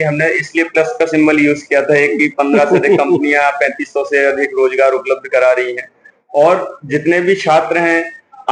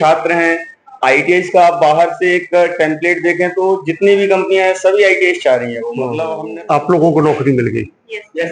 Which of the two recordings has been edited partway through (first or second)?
second